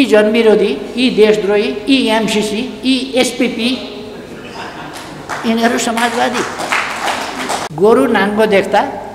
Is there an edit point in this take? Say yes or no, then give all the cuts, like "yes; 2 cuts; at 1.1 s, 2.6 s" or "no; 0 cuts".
yes; 1 cut; at 7.7 s